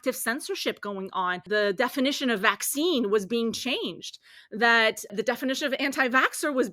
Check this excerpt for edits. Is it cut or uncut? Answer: cut